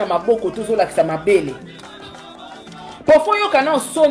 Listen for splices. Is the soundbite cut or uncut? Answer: uncut